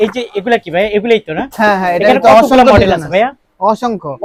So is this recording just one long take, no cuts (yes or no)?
yes